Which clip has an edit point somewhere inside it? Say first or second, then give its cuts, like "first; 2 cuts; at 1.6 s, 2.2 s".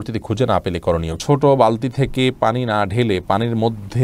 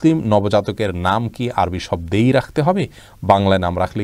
first; 1 cut; at 1.2 s